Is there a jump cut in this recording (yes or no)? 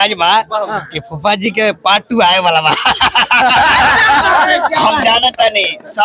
no